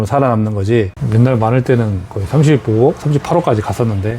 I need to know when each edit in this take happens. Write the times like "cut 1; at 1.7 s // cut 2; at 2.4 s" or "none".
cut 1; at 0.9 s